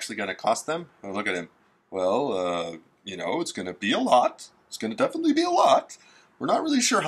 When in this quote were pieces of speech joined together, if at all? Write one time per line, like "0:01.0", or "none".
none